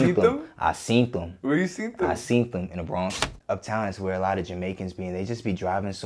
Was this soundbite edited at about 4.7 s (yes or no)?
no